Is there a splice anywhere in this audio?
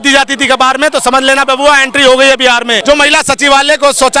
yes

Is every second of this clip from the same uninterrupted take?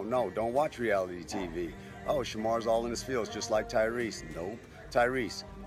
yes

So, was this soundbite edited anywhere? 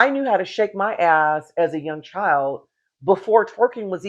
no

